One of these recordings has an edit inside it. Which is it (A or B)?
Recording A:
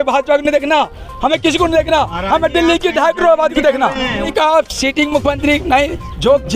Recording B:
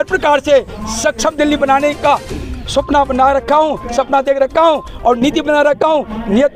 A